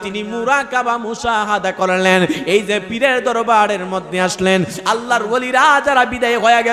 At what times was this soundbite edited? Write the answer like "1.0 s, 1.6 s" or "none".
none